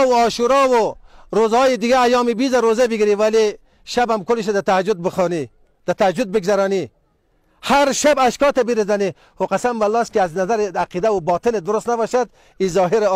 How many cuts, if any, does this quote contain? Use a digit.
0